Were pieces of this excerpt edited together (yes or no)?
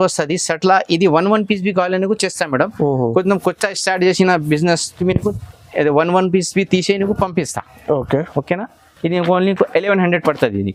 no